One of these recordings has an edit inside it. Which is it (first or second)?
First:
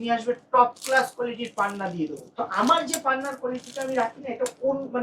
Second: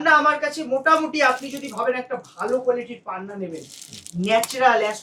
first